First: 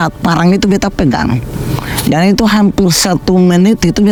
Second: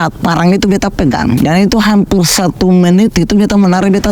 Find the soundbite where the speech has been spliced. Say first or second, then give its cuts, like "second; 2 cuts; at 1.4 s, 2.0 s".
second; 1 cut; at 1.4 s